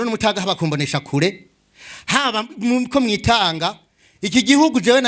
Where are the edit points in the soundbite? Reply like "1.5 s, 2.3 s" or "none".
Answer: none